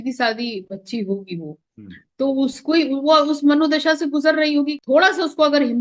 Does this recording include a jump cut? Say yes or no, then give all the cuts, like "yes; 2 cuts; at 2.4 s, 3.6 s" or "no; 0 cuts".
yes; 1 cut; at 4.8 s